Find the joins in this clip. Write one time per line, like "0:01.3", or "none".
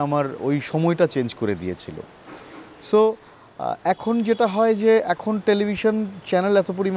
none